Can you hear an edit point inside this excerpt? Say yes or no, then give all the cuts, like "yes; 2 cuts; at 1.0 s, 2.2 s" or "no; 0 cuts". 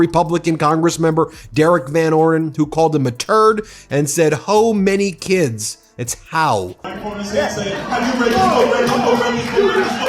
yes; 1 cut; at 6.8 s